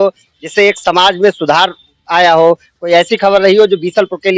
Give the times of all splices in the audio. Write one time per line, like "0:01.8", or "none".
none